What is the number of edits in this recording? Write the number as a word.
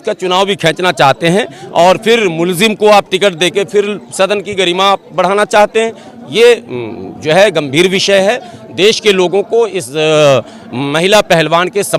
zero